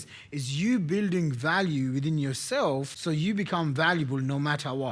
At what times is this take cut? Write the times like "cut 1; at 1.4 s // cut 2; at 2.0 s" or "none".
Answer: cut 1; at 2.9 s